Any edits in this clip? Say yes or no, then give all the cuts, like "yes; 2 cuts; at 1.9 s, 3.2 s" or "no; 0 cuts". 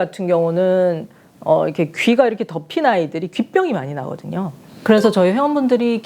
yes; 1 cut; at 4.7 s